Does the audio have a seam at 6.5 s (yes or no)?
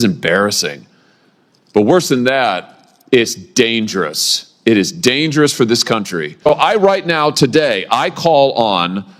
yes